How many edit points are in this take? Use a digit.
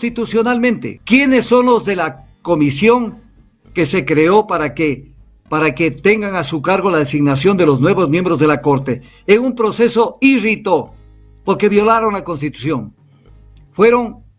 1